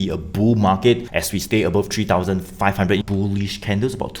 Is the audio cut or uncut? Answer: cut